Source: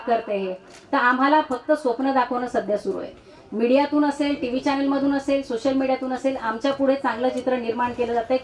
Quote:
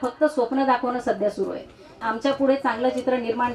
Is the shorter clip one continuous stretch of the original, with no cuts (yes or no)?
no